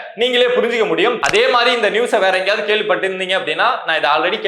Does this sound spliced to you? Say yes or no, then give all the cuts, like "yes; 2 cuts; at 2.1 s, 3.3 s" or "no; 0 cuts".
yes; 1 cut; at 1.2 s